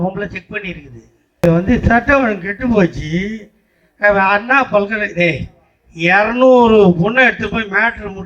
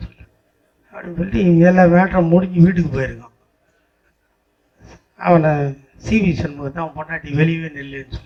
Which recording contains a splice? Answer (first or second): first